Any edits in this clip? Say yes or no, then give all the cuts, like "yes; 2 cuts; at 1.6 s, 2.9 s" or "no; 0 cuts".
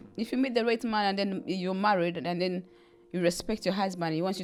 no; 0 cuts